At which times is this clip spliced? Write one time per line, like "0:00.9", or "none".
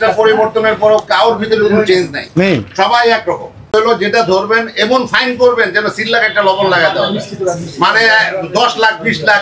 0:03.7